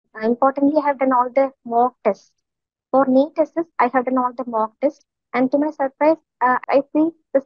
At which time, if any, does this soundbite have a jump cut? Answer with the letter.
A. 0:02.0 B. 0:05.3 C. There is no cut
C